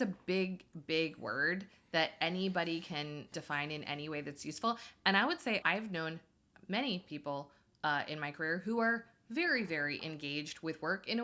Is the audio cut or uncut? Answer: cut